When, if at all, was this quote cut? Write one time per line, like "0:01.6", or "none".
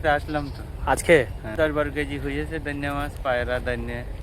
0:01.5